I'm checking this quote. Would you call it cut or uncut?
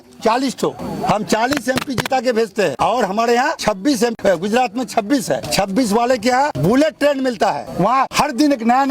cut